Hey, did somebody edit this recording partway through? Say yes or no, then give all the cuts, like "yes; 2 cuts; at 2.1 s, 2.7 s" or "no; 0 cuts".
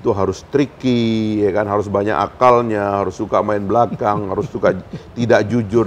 no; 0 cuts